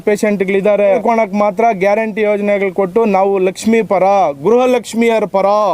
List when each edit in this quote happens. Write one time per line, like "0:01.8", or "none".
0:01.0